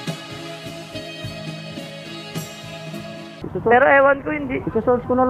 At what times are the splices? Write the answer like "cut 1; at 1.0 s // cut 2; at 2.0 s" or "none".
cut 1; at 3.3 s